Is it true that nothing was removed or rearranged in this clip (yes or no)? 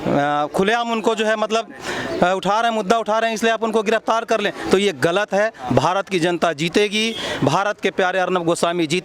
yes